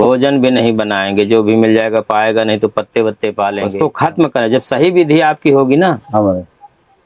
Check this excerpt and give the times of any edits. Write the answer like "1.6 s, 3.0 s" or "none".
3.6 s